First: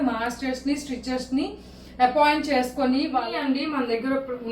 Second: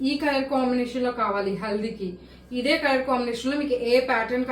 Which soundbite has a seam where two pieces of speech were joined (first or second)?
first